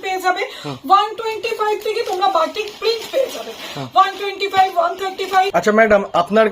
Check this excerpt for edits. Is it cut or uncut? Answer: cut